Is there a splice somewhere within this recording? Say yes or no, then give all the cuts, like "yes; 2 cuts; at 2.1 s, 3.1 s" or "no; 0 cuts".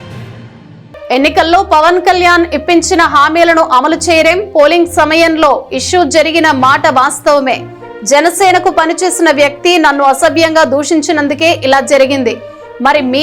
yes; 1 cut; at 1.1 s